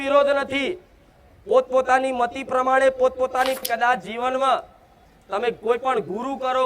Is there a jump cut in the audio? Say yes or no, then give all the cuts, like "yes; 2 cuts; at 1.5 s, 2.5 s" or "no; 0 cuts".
yes; 1 cut; at 3.7 s